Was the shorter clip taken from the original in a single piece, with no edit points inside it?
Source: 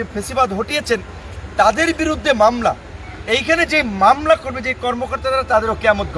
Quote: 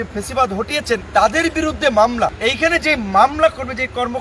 no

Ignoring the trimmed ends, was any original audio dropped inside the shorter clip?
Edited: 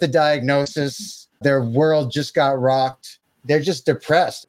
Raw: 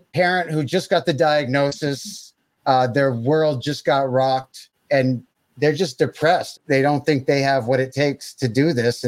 yes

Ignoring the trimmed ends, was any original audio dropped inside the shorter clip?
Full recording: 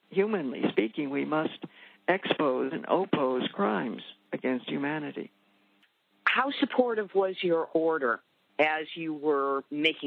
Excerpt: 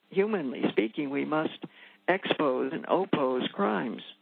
no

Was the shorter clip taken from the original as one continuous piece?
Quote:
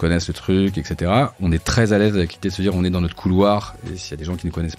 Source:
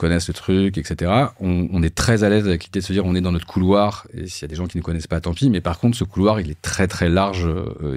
no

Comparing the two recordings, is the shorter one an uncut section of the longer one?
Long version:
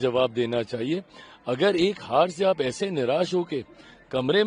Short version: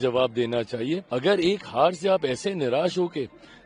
no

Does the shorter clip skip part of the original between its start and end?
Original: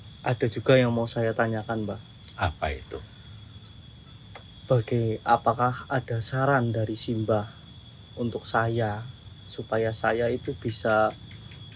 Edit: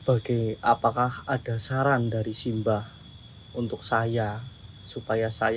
no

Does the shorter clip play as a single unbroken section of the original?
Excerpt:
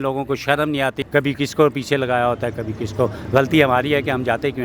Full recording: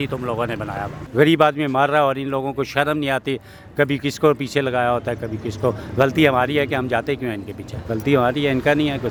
no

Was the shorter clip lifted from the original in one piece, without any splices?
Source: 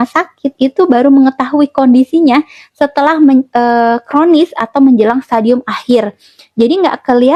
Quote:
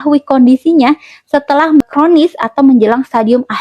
no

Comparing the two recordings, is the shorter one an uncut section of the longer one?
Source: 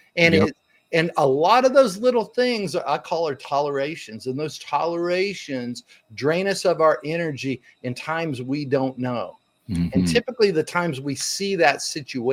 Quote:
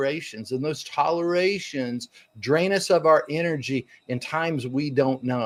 yes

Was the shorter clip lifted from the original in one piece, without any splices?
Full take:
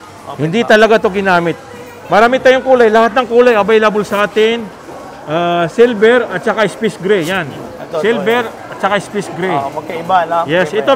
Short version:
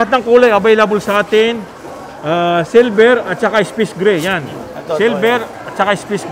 yes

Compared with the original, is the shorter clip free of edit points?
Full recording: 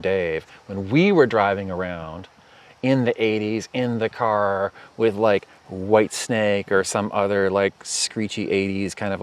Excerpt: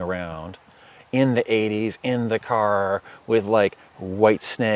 yes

